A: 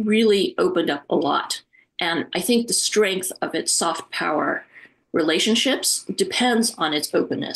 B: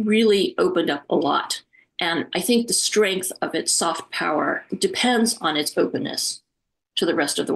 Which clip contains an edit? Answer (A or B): B